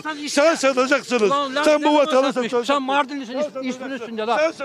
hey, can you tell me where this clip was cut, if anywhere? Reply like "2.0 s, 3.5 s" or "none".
none

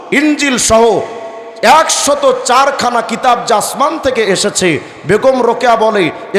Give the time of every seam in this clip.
none

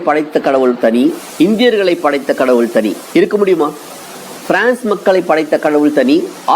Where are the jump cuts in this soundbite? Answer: 1.2 s, 3.0 s

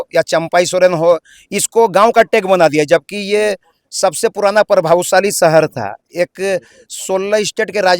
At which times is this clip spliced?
none

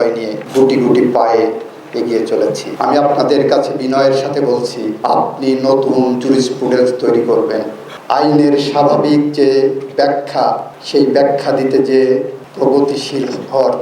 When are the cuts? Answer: 2.7 s, 7.9 s

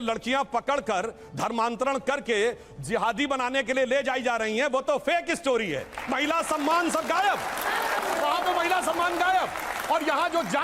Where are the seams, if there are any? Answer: 6.4 s

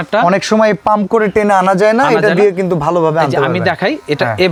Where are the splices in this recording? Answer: none

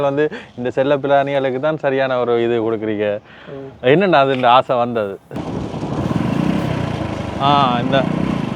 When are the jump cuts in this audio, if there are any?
5.3 s

